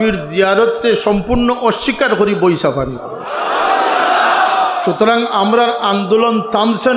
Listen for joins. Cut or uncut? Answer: uncut